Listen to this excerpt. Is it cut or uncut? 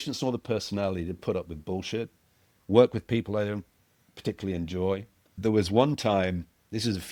uncut